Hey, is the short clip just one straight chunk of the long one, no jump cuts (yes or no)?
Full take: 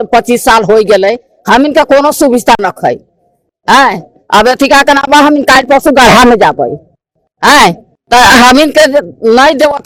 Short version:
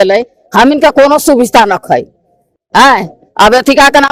yes